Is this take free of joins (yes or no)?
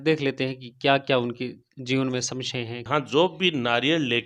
no